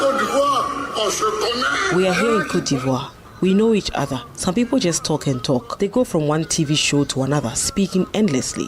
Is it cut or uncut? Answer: cut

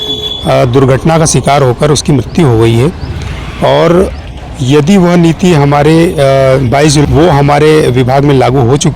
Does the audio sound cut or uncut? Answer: cut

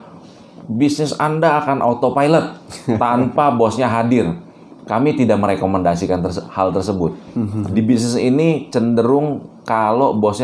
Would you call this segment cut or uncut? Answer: uncut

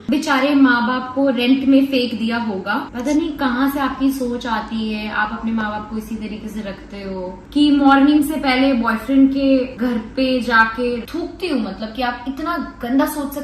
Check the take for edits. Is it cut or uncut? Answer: cut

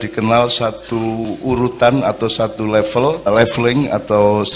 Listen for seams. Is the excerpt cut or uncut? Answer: cut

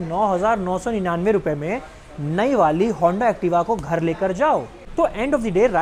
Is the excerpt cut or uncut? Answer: cut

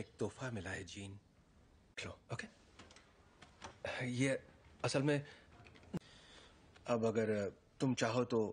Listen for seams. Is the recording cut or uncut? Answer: uncut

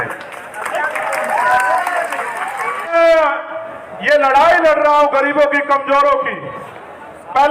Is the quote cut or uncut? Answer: cut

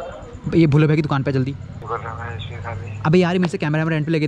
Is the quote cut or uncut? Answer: cut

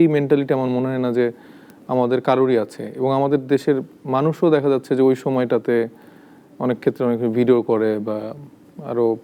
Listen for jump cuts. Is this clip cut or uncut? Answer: uncut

